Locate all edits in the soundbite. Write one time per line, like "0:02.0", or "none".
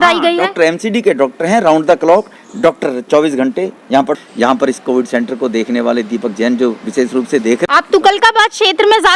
0:04.1
0:07.7